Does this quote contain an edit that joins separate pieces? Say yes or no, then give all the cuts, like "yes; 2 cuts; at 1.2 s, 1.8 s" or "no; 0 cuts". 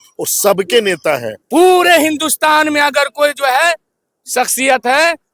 yes; 1 cut; at 1.4 s